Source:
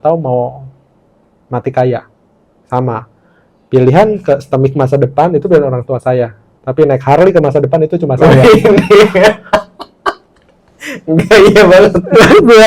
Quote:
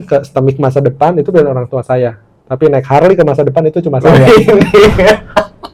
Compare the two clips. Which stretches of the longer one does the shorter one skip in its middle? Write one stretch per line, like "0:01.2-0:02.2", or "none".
none

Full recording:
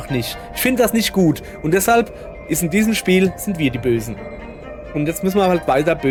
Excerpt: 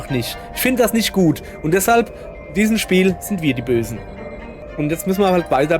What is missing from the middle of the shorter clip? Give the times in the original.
0:02.5-0:02.6

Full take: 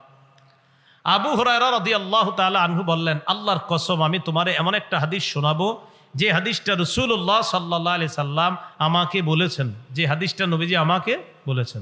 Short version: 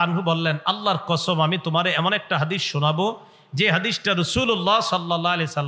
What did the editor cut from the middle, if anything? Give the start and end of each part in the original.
none

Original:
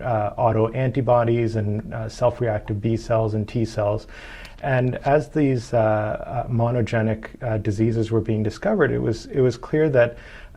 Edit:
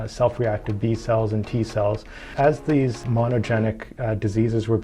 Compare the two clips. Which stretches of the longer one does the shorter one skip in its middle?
0:04.3-0:05.0
0:05.7-0:06.4

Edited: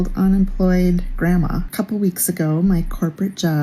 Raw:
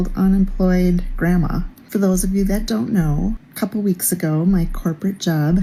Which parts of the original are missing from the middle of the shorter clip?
0:01.6-0:03.5

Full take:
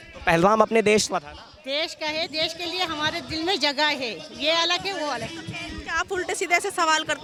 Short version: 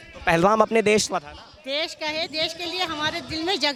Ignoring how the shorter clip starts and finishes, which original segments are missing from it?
none

